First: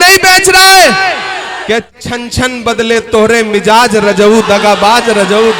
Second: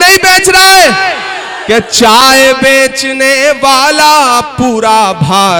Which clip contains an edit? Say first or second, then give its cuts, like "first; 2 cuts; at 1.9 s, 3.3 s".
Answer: first; 1 cut; at 1.9 s